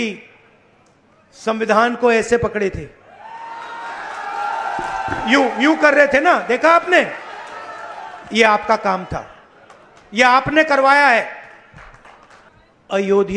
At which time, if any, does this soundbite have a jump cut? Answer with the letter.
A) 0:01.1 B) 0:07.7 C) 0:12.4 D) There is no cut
C